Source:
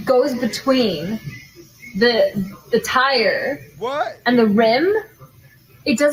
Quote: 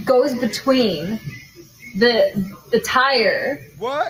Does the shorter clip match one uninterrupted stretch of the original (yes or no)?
yes